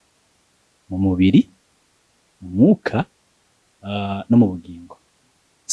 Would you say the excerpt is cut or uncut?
uncut